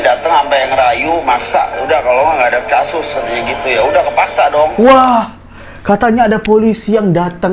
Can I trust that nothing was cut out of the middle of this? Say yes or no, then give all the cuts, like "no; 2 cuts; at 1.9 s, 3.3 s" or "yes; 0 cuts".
yes; 0 cuts